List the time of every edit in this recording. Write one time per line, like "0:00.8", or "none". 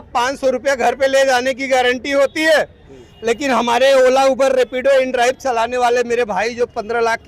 none